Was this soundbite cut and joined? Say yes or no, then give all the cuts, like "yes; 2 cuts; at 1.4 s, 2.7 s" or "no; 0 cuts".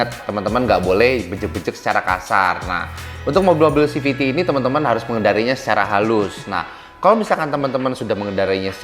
no; 0 cuts